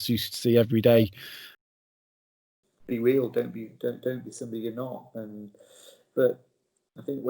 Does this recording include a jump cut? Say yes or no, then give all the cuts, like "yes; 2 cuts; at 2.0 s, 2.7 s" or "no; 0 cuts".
yes; 1 cut; at 2.2 s